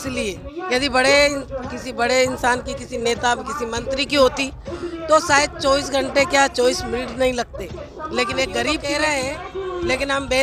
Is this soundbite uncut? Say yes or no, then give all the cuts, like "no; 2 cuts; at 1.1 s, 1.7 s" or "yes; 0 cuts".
no; 1 cut; at 8.8 s